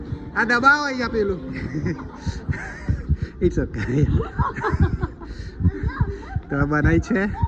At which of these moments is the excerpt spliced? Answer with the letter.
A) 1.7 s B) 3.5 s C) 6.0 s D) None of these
A